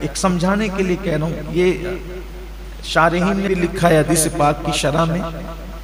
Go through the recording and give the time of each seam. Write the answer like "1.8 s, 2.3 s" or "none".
3.5 s